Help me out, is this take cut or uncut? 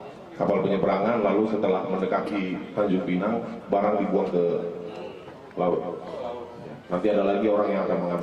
uncut